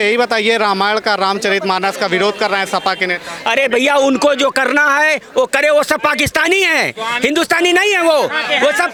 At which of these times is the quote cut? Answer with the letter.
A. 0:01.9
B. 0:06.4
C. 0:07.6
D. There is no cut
D